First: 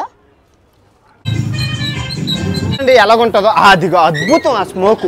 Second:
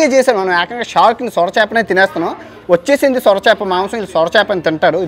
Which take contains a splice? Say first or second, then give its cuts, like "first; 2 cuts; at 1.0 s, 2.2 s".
first; 2 cuts; at 1.2 s, 2.8 s